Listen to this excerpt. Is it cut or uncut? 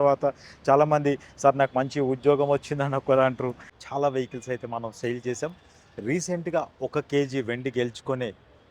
cut